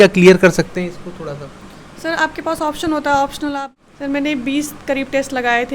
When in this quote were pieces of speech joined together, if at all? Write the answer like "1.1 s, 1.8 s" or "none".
3.6 s